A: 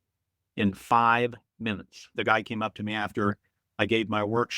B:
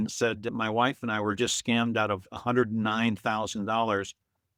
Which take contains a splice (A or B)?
A